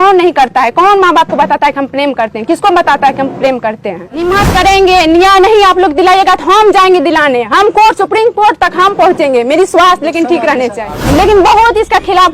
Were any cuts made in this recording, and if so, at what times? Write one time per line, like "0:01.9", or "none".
0:04.2
0:10.9